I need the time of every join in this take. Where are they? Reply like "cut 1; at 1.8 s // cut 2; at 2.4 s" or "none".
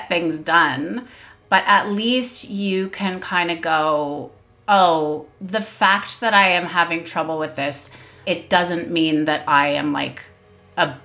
cut 1; at 5.3 s // cut 2; at 8.2 s